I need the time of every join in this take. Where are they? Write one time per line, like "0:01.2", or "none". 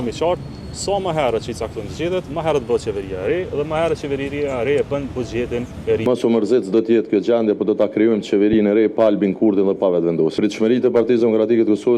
0:06.0